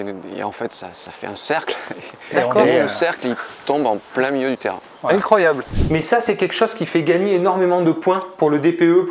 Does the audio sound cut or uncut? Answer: cut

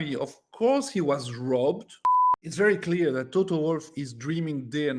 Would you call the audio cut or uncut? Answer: cut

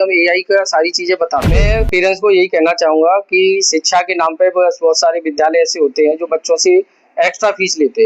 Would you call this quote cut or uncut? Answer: cut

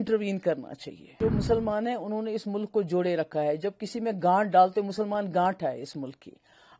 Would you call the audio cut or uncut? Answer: cut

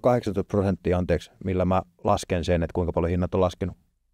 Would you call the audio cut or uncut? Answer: uncut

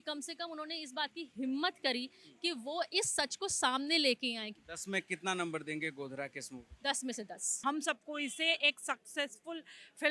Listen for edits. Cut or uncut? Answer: cut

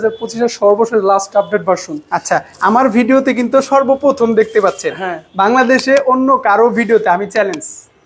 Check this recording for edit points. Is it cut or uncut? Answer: uncut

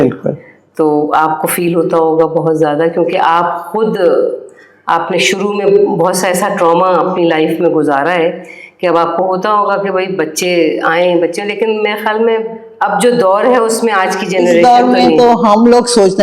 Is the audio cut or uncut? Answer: cut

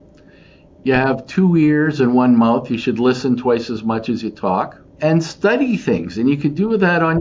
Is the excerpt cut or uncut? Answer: cut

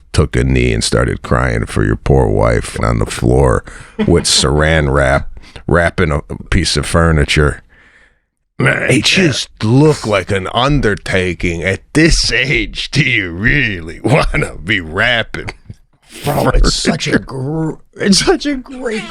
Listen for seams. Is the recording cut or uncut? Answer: cut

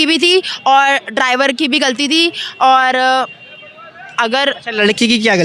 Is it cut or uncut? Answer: uncut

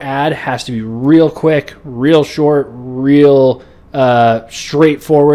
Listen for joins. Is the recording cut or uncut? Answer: uncut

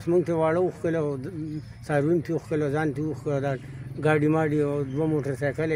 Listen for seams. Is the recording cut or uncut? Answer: uncut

